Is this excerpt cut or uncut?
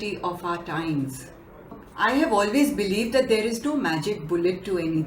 cut